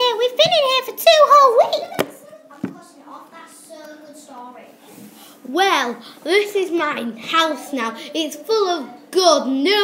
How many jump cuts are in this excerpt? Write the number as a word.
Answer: zero